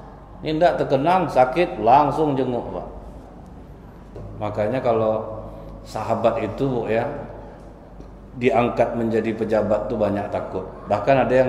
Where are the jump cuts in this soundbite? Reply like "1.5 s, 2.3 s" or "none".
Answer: 4.2 s